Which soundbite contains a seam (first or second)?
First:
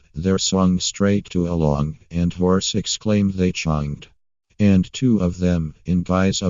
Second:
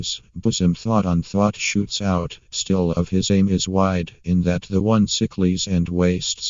first